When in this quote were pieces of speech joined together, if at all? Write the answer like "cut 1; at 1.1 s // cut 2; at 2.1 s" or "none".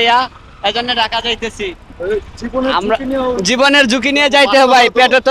none